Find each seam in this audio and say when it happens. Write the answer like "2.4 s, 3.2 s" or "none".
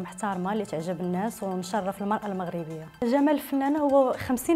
3.0 s